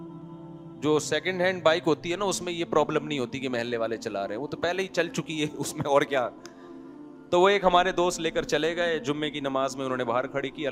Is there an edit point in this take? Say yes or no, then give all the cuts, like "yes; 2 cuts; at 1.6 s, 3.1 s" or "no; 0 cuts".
no; 0 cuts